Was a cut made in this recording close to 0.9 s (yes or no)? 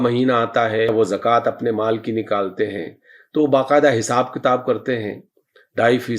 yes